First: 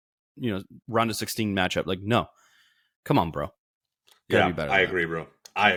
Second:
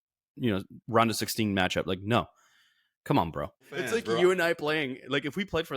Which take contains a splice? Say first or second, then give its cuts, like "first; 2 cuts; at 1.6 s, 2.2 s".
second; 1 cut; at 3.8 s